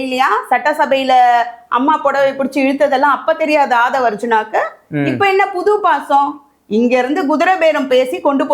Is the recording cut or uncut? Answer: uncut